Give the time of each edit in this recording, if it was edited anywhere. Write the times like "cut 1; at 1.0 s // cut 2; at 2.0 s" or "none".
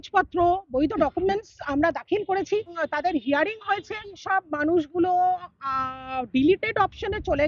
cut 1; at 2.8 s // cut 2; at 4.2 s